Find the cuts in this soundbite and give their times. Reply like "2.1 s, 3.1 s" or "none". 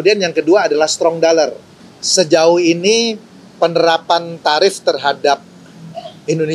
none